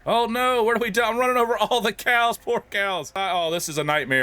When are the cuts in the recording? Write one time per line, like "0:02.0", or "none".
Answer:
0:03.2